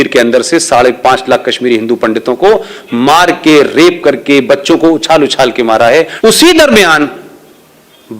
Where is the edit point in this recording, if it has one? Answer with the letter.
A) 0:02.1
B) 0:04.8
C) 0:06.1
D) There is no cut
C